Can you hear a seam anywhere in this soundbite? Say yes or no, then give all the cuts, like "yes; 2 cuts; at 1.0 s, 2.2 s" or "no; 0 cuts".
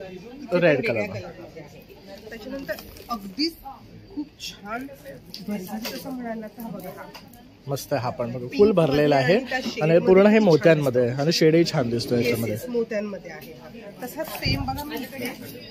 no; 0 cuts